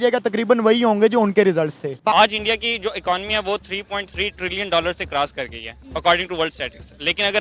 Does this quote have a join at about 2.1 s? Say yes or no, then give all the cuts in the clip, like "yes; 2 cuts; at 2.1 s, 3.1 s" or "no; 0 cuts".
yes; 1 cut; at 2.1 s